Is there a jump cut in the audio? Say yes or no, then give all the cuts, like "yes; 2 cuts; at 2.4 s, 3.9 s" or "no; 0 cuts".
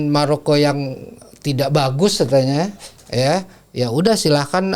no; 0 cuts